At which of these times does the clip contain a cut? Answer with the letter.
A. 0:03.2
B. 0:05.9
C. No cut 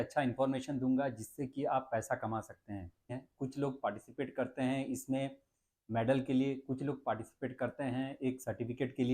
A